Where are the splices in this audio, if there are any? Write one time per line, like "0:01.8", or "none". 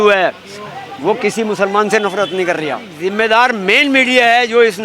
0:02.9